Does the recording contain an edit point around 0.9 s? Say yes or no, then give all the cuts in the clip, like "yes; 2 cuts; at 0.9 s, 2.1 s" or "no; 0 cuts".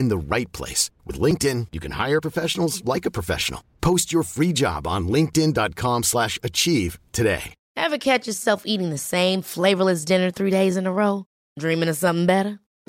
no; 1 cut; at 7.6 s